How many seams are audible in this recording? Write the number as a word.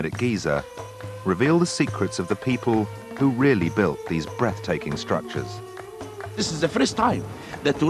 one